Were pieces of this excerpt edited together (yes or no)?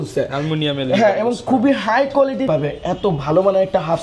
yes